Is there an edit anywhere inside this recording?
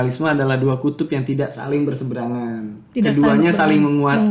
no; 0 cuts

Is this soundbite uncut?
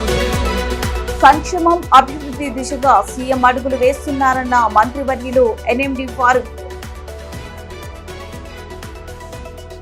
no; 1 cut; at 1.0 s

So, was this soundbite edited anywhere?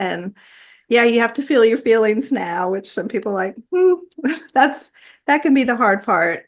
no; 0 cuts

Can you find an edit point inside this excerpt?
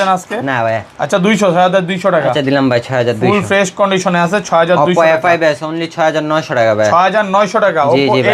no; 0 cuts

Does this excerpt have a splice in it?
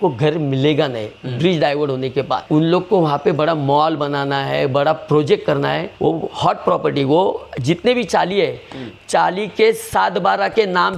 no; 0 cuts

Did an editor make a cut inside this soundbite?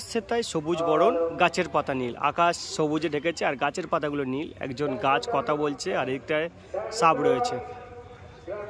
no; 0 cuts

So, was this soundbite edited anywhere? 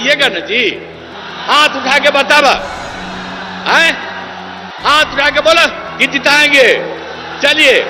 no; 0 cuts

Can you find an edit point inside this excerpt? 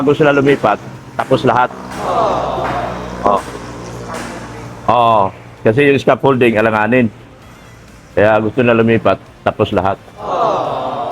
yes; 3 cuts; at 1.8 s, 3.1 s, 10.1 s

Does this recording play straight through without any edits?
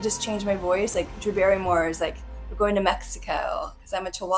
yes; 0 cuts

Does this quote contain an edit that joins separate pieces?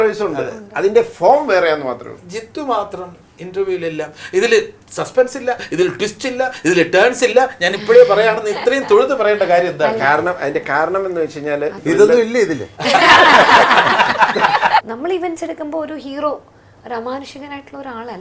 yes; 3 cuts; at 2.1 s, 11.8 s, 14.8 s

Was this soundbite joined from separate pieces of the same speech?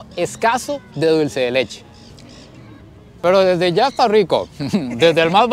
no; 0 cuts

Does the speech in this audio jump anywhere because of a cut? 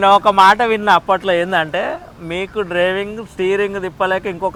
no; 0 cuts

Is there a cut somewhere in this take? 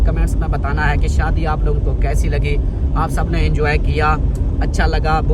no; 0 cuts

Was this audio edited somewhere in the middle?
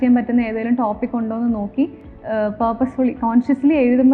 no; 0 cuts

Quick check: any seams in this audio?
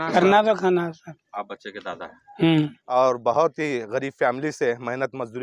yes; 2 cuts; at 1.1 s, 2.8 s

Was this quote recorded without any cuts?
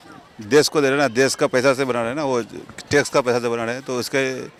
yes; 0 cuts

